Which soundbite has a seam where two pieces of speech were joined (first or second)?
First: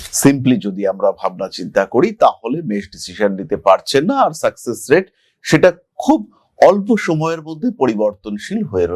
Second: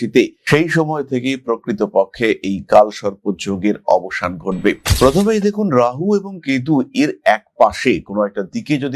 second